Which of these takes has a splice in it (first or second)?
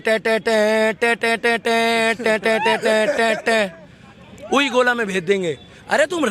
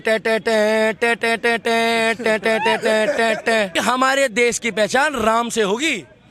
second